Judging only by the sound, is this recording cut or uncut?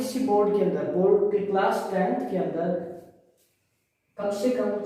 uncut